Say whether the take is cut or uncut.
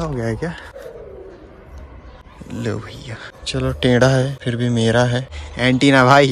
cut